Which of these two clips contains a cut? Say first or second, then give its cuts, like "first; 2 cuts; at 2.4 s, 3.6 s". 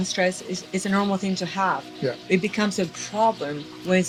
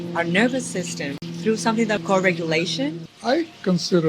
second; 3 cuts; at 1.2 s, 2.0 s, 3.1 s